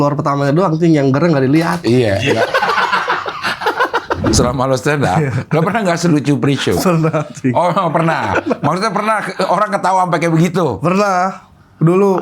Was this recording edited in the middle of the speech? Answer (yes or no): yes